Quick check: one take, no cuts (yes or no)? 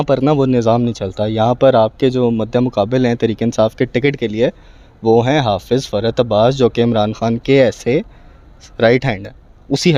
yes